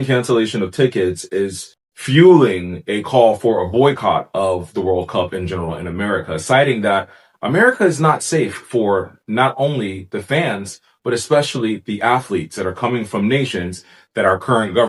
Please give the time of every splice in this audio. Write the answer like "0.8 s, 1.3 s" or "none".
none